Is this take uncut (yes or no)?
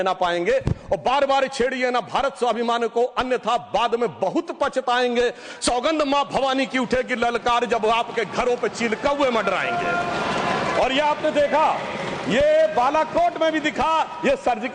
yes